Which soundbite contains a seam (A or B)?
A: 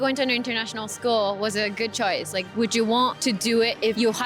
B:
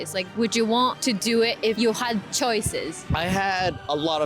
B